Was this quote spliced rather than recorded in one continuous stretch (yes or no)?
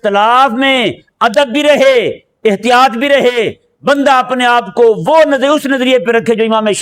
no